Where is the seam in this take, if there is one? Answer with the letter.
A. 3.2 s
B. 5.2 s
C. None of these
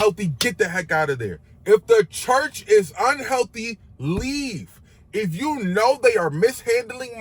C